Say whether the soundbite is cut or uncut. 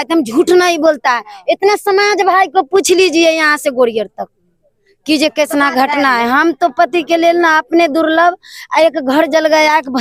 uncut